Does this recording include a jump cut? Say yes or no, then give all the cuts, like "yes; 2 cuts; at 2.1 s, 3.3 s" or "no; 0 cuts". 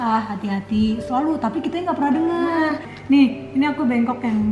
yes; 1 cut; at 2.9 s